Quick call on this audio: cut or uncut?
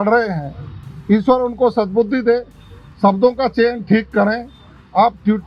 uncut